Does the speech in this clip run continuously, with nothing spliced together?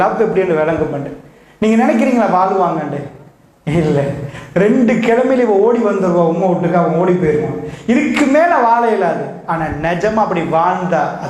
yes; 0 cuts

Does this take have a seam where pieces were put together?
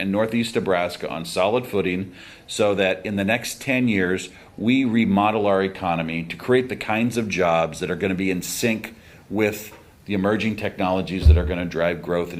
no; 0 cuts

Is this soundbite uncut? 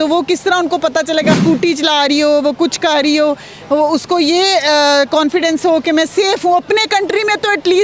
no; 1 cut; at 1.3 s

